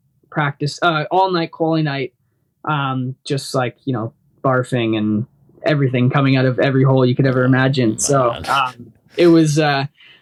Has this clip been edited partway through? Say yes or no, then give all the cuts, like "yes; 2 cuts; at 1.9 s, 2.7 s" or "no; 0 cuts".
no; 0 cuts